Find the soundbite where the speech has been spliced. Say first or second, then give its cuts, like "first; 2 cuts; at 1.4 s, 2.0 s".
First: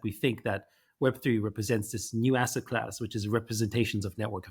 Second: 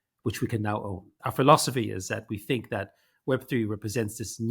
second; 1 cut; at 1.1 s